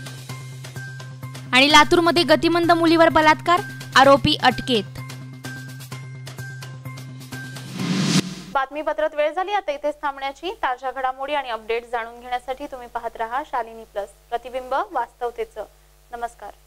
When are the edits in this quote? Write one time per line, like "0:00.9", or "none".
none